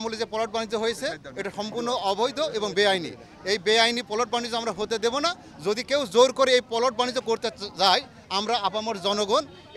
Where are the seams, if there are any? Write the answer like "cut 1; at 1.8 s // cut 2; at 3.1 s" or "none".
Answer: none